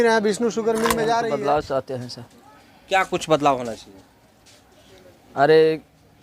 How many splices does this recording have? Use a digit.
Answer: 1